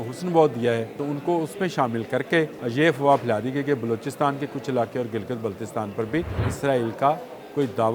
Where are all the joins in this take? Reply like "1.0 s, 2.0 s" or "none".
1.0 s, 2.6 s, 6.4 s

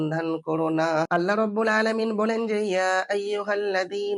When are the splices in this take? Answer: 1.1 s

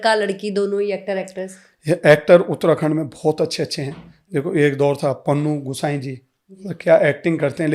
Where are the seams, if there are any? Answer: none

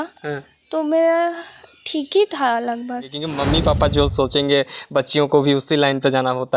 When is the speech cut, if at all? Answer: 3.2 s

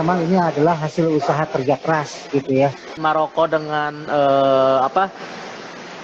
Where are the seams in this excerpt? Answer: 2.9 s

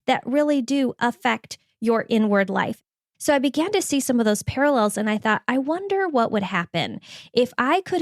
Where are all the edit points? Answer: 2.8 s

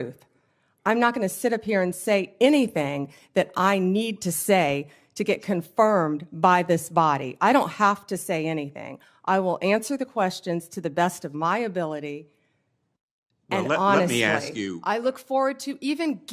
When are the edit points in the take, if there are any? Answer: 14.7 s

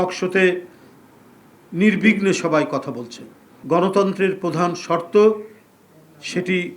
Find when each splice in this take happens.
3.5 s

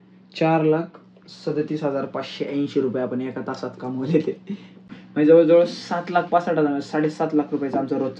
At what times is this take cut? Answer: 4.9 s

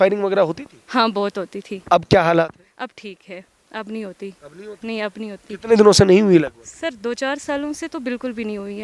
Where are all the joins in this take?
none

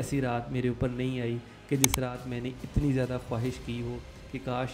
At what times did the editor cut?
none

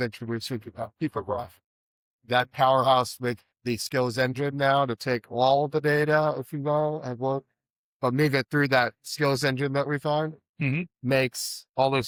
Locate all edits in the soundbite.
none

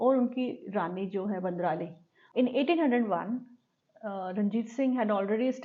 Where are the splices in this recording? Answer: 2.2 s

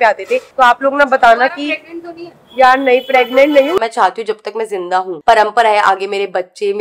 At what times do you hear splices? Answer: 3.8 s, 5.2 s

